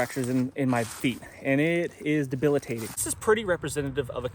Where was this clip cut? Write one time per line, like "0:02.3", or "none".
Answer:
0:03.1